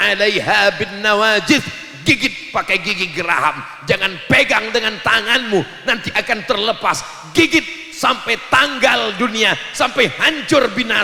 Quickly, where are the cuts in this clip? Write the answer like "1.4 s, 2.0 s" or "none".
none